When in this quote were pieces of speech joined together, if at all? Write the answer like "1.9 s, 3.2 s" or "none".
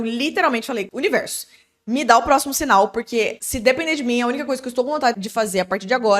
0.9 s, 3.4 s, 5.2 s